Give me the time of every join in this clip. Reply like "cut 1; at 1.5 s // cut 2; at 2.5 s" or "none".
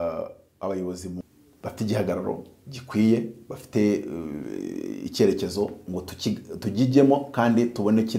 cut 1; at 1.2 s